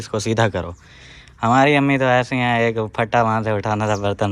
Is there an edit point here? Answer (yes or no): no